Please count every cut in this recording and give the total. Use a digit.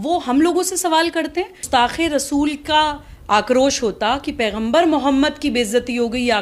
1